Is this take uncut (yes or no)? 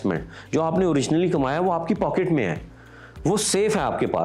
yes